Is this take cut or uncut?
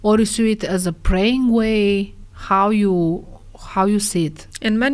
uncut